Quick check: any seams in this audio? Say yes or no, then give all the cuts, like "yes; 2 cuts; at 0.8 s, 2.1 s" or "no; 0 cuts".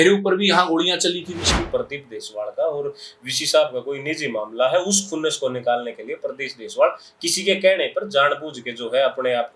yes; 1 cut; at 1.5 s